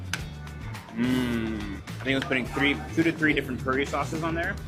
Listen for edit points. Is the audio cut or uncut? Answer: uncut